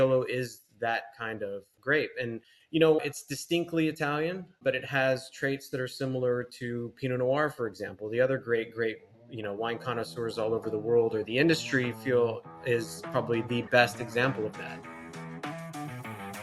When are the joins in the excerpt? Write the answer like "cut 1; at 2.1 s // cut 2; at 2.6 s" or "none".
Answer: cut 1; at 15.0 s